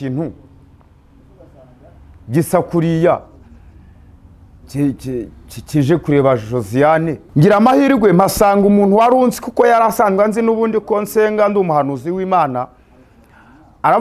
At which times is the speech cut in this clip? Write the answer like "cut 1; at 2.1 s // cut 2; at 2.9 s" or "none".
cut 1; at 7.2 s